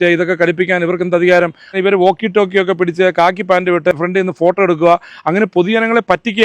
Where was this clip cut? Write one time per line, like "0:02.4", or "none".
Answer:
0:01.8
0:03.9